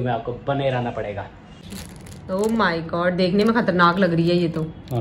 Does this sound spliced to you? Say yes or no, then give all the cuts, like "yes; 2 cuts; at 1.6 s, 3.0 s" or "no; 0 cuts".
yes; 1 cut; at 1.9 s